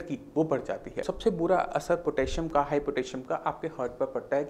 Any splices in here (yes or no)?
yes